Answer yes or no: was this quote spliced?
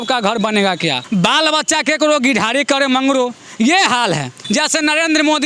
yes